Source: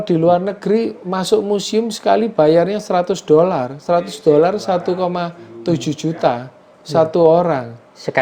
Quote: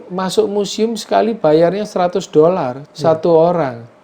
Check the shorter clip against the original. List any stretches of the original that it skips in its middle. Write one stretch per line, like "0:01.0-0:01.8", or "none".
0:03.7-0:06.7